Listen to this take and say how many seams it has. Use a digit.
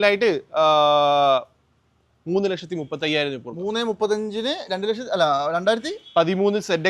0